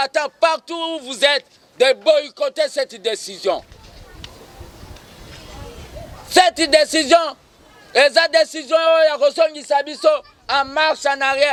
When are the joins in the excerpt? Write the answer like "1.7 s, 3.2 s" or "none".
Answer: none

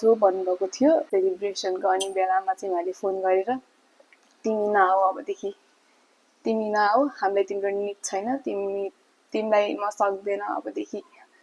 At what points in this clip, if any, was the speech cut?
1.1 s

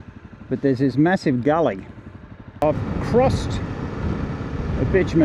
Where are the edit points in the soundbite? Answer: 2.6 s

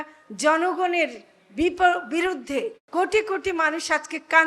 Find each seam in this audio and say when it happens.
2.8 s

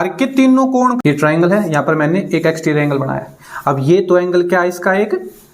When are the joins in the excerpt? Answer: 1.0 s

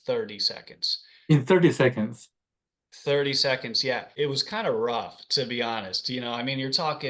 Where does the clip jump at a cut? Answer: 4.1 s

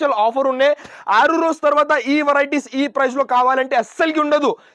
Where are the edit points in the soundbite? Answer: none

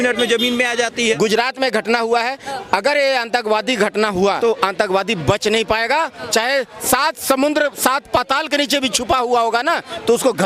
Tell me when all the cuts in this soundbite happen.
1.2 s, 4.4 s

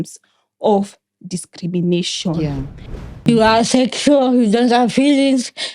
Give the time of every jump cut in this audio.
3.0 s

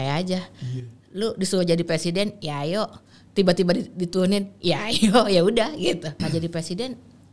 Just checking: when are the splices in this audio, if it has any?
6.1 s

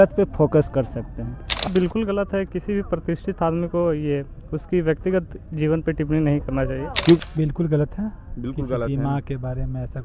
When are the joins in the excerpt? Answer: 1.7 s, 7.2 s

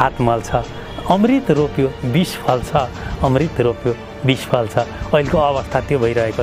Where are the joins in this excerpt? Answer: none

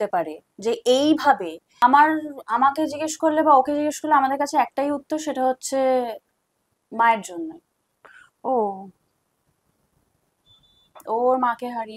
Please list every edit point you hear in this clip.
1.6 s

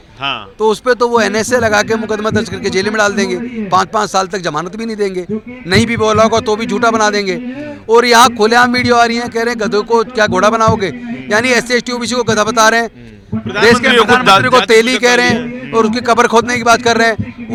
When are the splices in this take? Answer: none

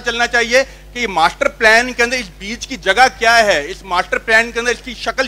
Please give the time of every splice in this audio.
none

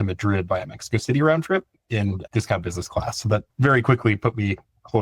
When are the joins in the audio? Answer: 3.5 s

